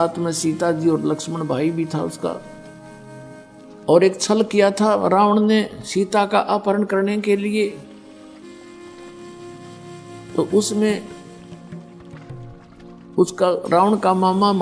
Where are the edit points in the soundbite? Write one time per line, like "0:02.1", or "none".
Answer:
0:11.0
0:12.8